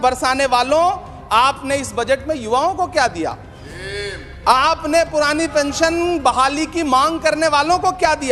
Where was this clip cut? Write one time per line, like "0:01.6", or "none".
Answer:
none

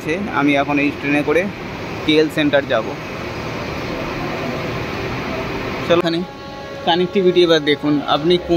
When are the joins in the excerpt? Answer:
0:06.0

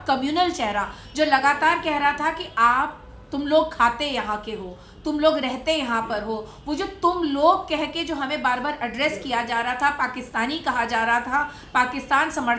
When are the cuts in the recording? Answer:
none

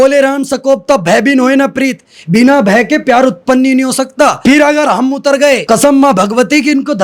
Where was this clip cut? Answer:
0:04.4
0:05.6

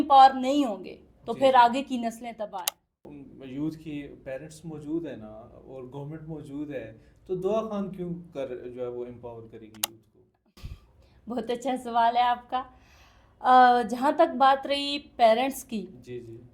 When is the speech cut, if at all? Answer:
0:03.1

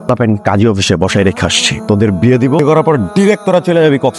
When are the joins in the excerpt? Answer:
0:02.6

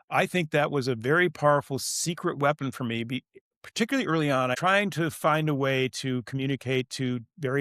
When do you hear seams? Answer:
0:04.5

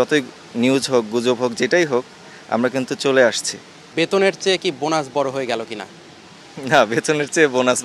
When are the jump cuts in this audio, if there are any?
0:03.9

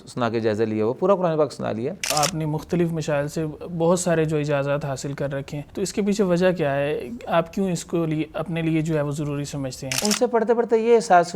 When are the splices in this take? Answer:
0:02.1
0:05.6
0:10.0

